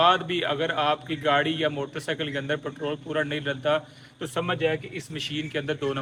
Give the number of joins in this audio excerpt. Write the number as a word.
zero